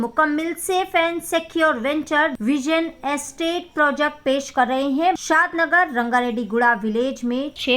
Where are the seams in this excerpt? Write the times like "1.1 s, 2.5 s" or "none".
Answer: 2.4 s, 5.2 s